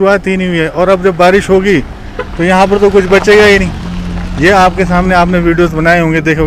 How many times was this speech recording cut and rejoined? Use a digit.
0